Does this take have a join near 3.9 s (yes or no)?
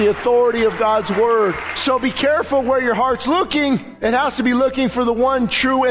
yes